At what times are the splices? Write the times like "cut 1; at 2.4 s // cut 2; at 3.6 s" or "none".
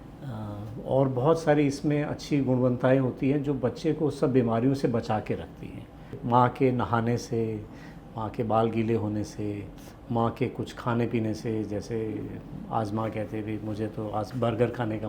cut 1; at 6.2 s